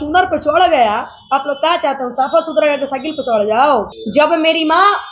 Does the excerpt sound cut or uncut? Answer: cut